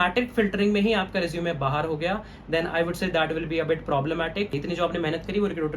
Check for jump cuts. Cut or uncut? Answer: cut